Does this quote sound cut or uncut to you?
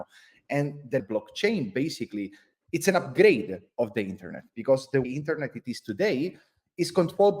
cut